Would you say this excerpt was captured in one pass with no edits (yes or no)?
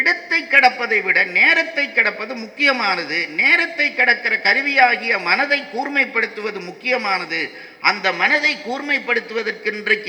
yes